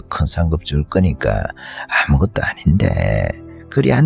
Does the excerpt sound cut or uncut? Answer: uncut